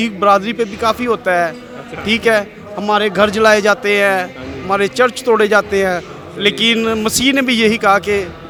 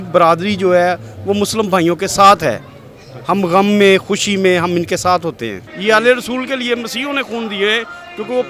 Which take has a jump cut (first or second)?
second